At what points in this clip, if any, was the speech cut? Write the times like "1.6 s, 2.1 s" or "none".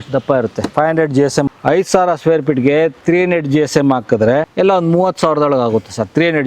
1.5 s, 4.5 s